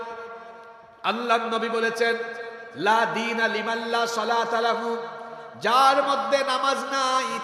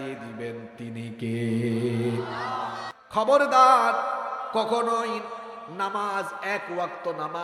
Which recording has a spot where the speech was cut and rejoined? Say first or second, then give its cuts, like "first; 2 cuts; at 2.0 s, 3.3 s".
second; 1 cut; at 2.8 s